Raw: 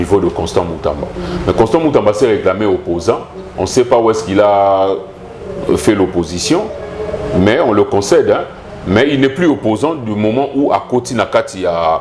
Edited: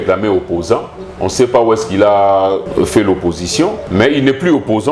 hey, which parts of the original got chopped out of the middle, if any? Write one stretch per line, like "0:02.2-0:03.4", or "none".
0:05.0-0:05.6
0:06.7-0:08.8